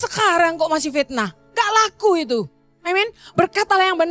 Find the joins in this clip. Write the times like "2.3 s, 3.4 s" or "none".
none